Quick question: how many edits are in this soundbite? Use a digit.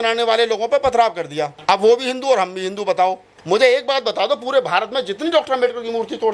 2